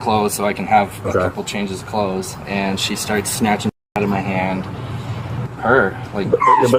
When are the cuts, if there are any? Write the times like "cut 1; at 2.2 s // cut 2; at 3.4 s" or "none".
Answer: cut 1; at 5.4 s

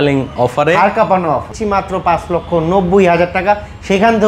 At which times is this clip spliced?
cut 1; at 1.5 s

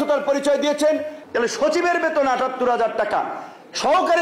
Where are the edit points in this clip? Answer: cut 1; at 1.1 s

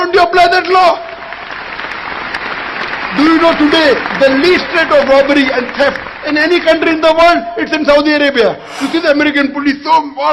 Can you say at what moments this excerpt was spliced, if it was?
cut 1; at 8.7 s

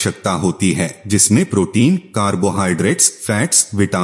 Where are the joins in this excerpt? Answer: cut 1; at 1.0 s

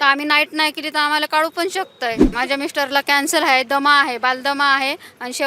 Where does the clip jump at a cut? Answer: cut 1; at 2.3 s

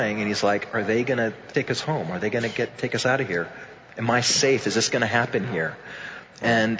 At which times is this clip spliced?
cut 1; at 1.4 s

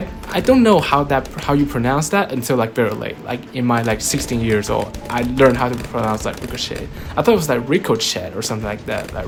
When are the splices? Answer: none

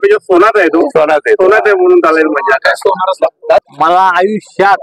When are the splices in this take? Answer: cut 1; at 3.7 s

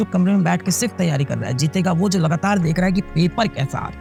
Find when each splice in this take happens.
none

